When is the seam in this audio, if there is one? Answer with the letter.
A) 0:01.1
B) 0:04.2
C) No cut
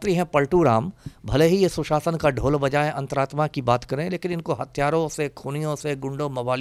C